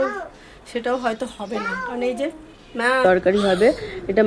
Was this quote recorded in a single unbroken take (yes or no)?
no